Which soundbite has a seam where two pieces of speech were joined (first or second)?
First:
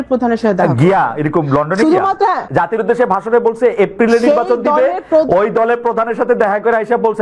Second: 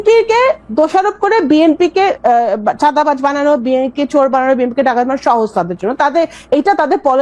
first